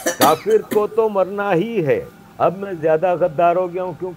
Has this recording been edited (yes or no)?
yes